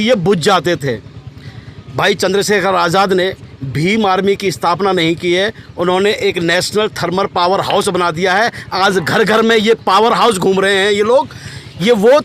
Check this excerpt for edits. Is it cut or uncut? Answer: uncut